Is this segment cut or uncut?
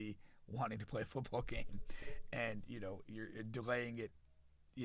uncut